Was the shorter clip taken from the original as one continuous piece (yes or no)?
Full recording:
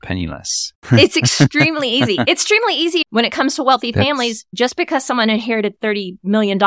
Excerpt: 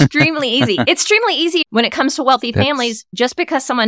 yes